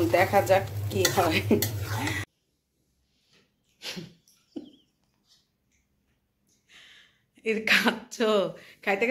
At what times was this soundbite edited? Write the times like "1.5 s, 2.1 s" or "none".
2.2 s